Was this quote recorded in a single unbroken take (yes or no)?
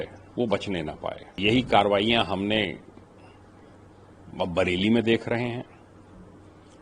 no